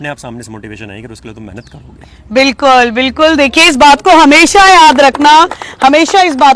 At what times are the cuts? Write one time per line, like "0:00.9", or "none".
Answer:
none